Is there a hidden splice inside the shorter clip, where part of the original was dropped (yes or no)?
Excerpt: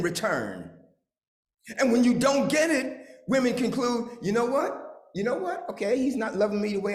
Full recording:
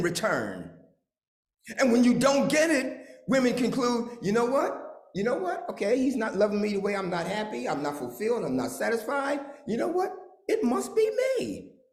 no